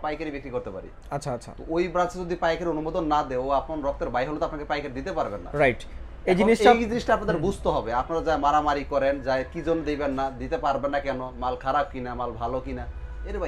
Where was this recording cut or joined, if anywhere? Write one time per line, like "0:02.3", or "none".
none